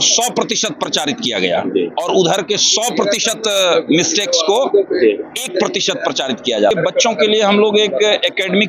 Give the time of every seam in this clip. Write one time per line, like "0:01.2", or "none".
0:06.7